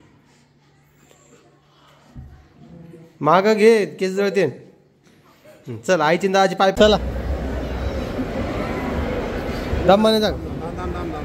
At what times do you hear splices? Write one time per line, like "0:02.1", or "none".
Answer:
0:06.7